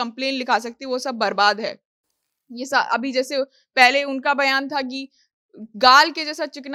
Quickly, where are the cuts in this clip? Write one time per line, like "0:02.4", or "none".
none